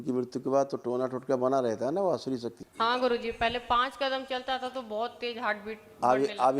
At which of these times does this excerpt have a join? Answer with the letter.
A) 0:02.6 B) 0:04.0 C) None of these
A